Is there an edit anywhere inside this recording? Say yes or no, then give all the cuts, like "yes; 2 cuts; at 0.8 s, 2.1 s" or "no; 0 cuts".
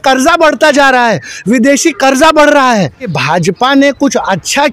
yes; 1 cut; at 3.2 s